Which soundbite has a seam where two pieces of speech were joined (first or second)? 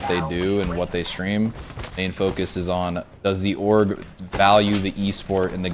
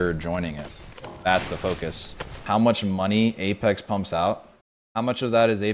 second